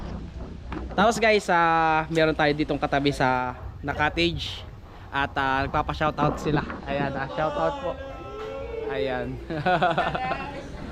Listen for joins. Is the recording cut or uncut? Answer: uncut